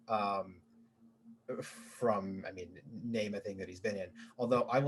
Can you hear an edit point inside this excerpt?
no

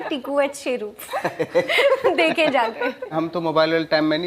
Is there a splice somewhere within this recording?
yes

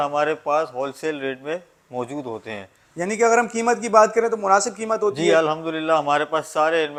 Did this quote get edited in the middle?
no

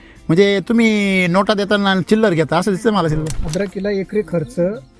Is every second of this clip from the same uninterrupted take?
no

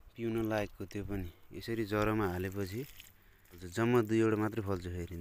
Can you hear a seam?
yes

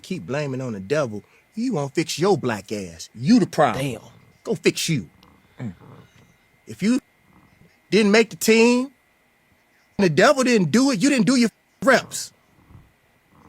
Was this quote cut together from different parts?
yes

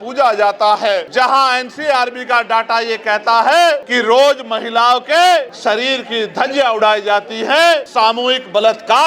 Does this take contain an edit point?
yes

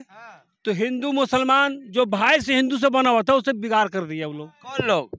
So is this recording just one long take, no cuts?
yes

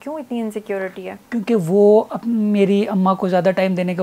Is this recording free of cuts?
yes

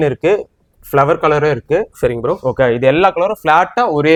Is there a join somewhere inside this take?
no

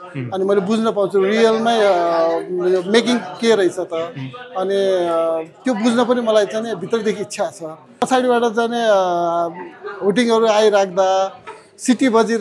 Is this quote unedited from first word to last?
no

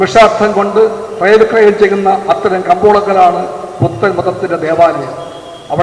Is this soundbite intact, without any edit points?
yes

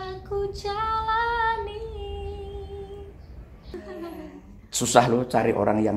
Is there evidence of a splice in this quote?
yes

